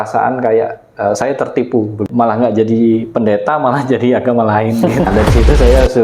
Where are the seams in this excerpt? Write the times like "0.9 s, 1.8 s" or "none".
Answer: 2.0 s, 5.1 s

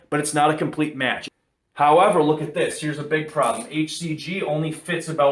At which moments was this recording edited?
1.2 s

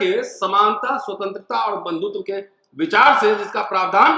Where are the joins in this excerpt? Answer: none

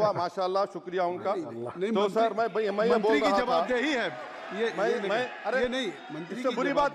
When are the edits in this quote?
none

